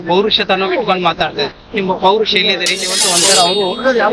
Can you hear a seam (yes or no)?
yes